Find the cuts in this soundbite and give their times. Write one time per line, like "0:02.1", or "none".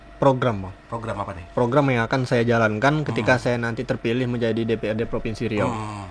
none